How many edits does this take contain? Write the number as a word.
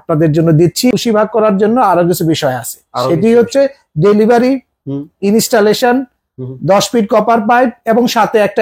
one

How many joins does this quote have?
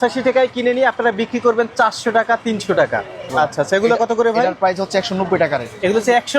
one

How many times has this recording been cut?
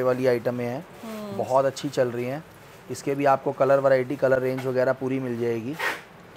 zero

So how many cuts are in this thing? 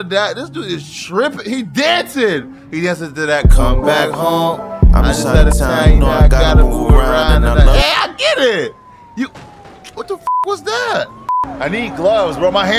one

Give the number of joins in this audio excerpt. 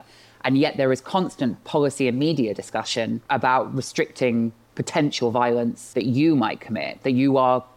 two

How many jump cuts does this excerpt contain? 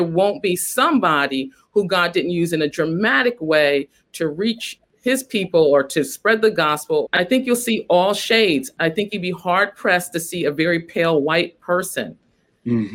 three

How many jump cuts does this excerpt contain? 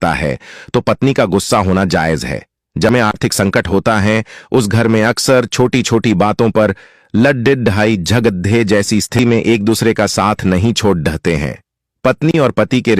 two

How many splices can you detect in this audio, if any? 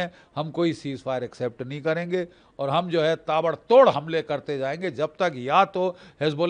zero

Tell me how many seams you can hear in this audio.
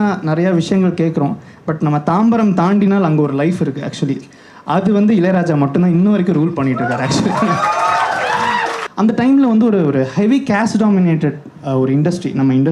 one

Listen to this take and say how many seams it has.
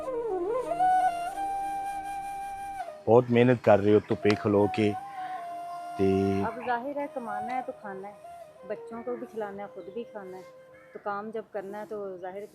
one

